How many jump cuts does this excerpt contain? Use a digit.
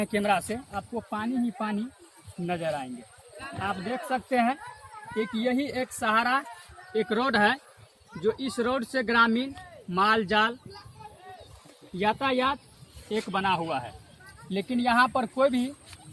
0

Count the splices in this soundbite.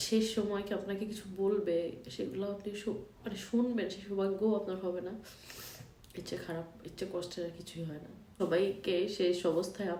1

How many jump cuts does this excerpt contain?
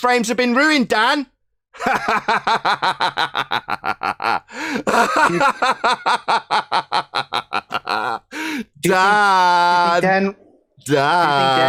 0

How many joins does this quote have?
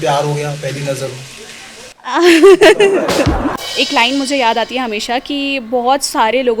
1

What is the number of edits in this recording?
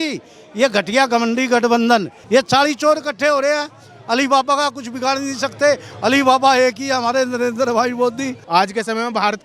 2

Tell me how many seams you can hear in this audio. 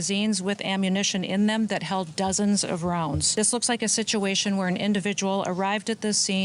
1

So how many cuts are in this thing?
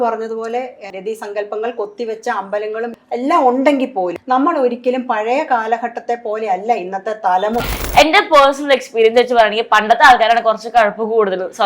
3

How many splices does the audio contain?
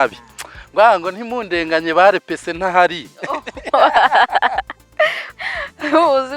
1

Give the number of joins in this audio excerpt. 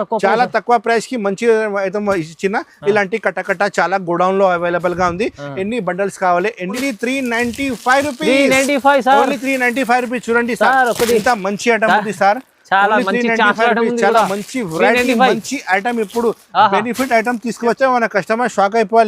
2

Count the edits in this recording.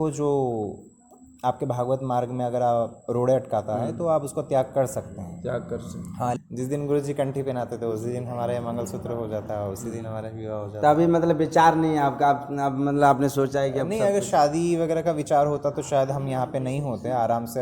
1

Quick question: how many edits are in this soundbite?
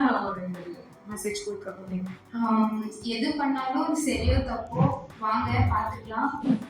1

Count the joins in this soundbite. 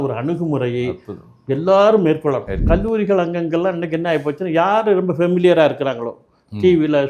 1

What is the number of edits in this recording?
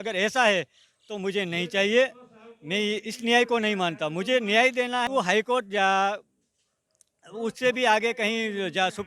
1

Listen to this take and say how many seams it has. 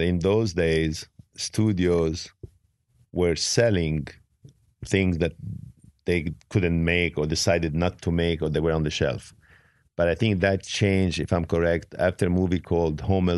0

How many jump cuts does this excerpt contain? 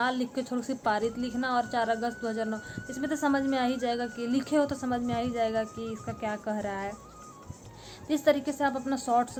0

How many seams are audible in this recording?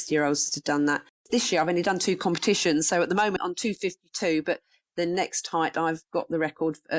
2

